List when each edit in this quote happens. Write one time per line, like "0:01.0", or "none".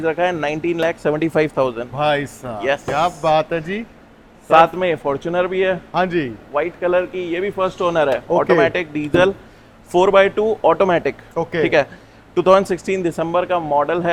none